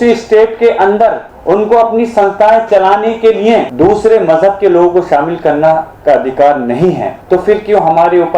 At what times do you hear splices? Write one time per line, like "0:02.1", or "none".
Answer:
0:01.3
0:03.7
0:07.1